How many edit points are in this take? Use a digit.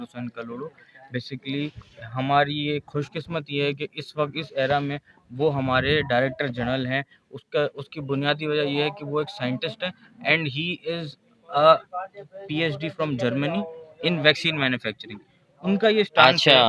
0